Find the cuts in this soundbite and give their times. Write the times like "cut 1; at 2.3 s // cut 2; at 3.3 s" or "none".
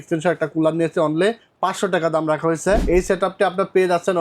cut 1; at 1.5 s // cut 2; at 2.8 s